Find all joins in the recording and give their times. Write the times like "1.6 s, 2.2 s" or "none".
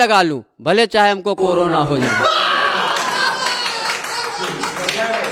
none